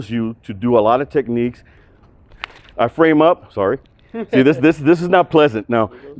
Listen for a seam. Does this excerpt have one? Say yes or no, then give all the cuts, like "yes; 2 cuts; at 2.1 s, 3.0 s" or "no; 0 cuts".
yes; 1 cut; at 1.8 s